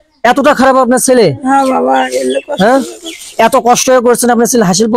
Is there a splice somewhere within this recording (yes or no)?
no